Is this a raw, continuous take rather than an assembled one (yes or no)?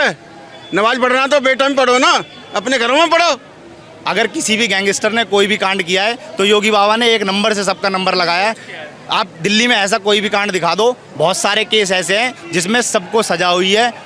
no